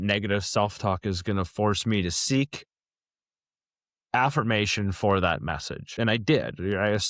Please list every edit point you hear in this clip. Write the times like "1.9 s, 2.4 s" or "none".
6.0 s